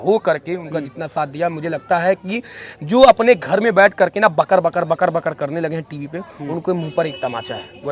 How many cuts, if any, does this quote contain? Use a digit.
0